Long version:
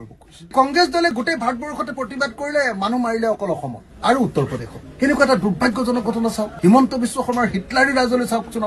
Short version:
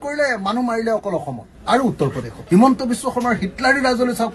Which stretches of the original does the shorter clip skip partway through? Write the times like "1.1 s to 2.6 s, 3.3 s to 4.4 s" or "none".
4.7 s to 6.5 s